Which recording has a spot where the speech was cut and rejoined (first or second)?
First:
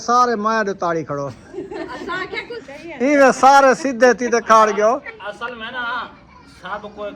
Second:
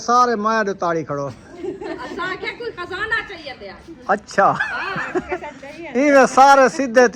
first